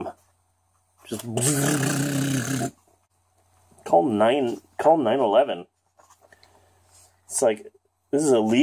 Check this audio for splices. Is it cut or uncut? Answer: uncut